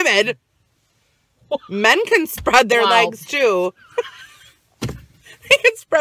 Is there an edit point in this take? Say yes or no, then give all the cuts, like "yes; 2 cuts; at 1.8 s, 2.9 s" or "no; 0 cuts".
no; 0 cuts